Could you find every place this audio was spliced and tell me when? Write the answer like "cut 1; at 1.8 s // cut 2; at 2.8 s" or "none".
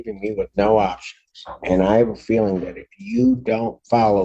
none